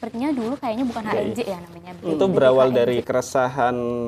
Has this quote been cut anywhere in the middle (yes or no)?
yes